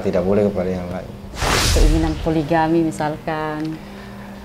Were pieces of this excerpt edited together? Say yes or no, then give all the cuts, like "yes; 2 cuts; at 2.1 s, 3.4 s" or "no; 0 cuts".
yes; 1 cut; at 1.6 s